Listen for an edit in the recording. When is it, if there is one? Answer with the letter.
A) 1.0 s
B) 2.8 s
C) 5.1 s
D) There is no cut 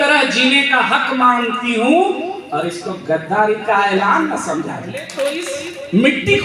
C